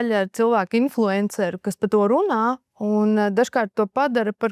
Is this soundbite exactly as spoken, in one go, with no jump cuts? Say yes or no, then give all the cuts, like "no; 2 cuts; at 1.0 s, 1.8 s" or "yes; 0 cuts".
no; 1 cut; at 2.7 s